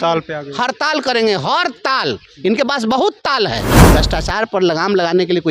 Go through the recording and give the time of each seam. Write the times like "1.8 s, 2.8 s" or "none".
3.8 s